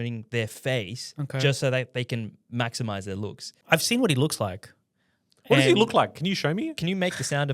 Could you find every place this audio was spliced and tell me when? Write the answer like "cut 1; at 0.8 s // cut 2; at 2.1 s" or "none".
cut 1; at 3.6 s // cut 2; at 6.8 s